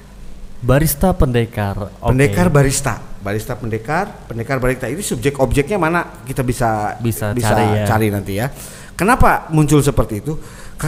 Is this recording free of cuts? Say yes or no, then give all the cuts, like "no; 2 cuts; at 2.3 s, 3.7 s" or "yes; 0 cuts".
yes; 0 cuts